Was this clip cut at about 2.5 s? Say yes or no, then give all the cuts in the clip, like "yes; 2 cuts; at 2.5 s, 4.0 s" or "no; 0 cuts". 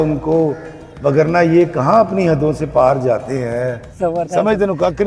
no; 1 cut; at 3.8 s